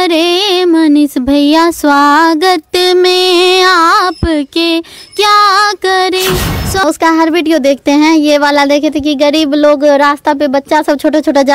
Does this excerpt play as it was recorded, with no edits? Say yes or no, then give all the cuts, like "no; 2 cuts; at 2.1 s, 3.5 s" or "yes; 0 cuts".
no; 1 cut; at 6.8 s